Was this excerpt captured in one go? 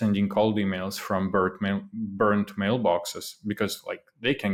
yes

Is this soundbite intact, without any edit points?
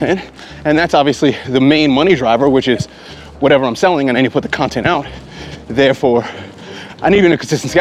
yes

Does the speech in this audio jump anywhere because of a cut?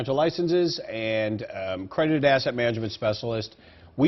no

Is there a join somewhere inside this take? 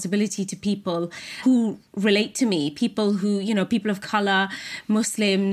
yes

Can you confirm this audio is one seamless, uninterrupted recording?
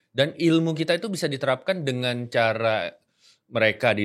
yes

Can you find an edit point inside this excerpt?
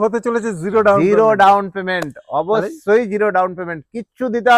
no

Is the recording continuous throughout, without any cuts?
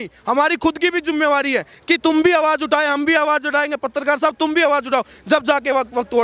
yes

